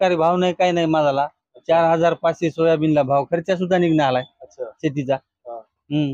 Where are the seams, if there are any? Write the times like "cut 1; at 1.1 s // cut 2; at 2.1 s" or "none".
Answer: none

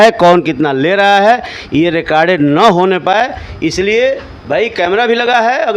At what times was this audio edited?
none

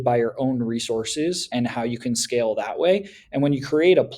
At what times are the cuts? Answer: cut 1; at 1.5 s

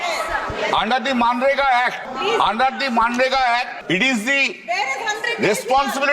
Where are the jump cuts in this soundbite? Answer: cut 1; at 2.0 s // cut 2; at 3.8 s

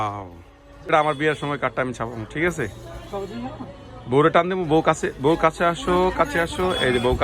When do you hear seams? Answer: cut 1; at 0.9 s

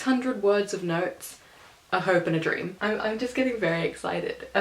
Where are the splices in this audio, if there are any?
cut 1; at 2.7 s

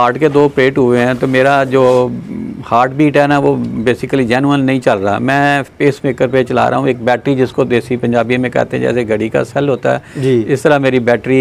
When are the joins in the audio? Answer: none

